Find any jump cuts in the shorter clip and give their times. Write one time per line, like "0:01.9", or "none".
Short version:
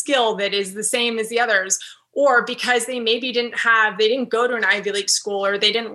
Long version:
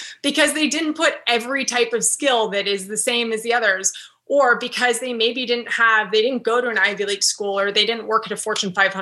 none

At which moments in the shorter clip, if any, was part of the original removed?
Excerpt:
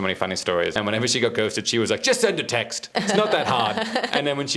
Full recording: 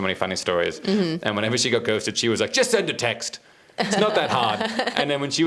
0:00.7
0:02.8

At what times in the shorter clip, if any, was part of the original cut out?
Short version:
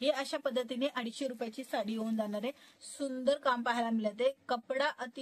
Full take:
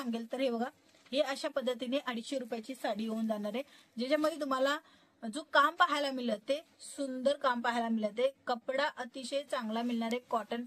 0:02.7

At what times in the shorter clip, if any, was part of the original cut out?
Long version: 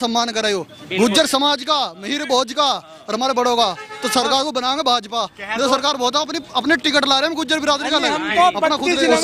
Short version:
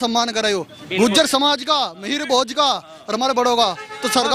none

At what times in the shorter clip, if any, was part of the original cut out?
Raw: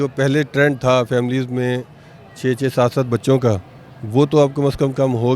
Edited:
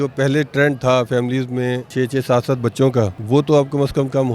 0:01.8
0:03.2

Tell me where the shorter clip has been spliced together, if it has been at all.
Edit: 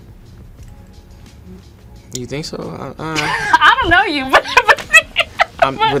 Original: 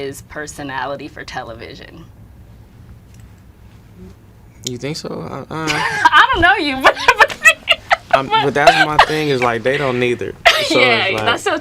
none

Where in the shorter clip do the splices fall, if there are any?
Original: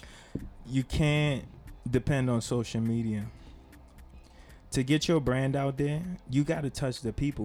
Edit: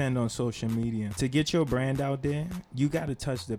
0:01.1

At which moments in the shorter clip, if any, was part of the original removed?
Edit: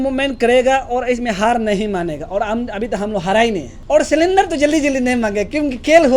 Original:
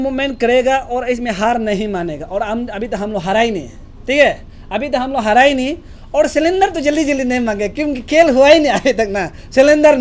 0:03.7

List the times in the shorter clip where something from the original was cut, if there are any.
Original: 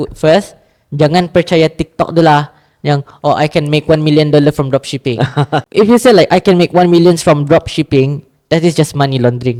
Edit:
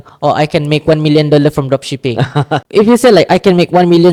none

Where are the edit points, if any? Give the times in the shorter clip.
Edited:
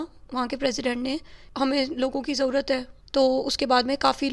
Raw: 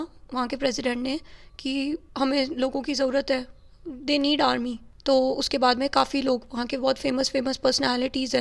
0:01.5
0:03.0

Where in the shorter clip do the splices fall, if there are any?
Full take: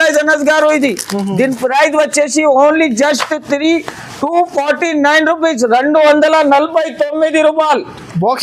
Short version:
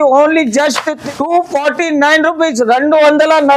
0:01.0

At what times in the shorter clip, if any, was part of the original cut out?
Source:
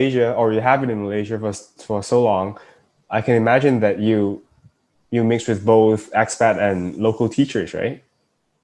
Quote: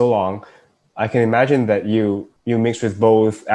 0:02.3

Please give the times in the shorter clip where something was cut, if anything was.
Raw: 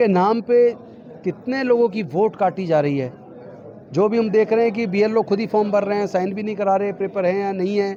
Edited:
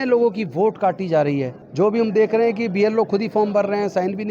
0:01.6

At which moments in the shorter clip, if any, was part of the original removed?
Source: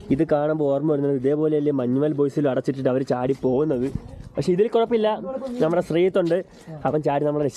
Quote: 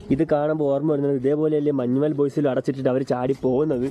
none

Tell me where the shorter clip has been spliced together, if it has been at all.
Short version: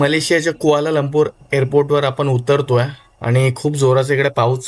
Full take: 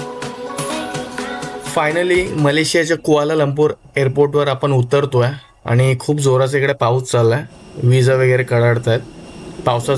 none

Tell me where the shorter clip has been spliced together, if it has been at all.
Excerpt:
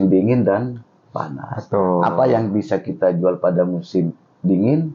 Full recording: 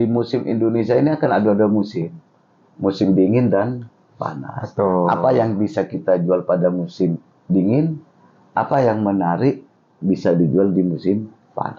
none

